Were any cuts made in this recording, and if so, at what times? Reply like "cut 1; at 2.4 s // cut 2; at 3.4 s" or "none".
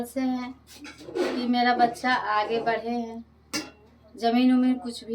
none